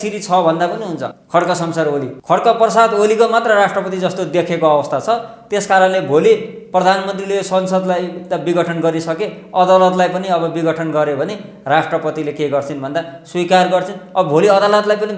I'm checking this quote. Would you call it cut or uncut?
cut